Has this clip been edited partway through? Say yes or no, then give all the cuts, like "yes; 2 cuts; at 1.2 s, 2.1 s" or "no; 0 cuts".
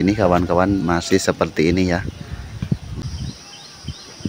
yes; 1 cut; at 3.0 s